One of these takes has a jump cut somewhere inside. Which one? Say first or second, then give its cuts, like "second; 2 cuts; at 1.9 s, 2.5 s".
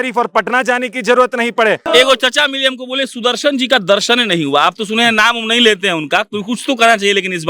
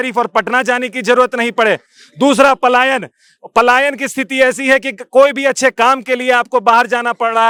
first; 1 cut; at 1.8 s